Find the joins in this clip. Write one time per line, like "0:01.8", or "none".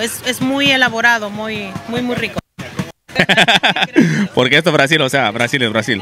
0:02.9